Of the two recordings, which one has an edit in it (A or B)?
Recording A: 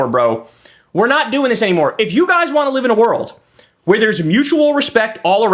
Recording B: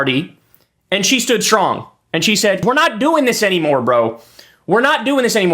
B